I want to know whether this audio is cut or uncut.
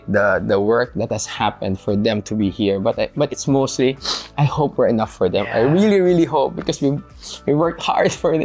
uncut